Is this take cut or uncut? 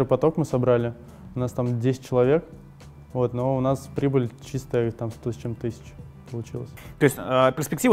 uncut